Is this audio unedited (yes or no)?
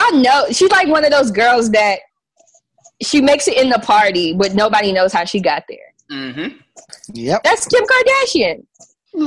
yes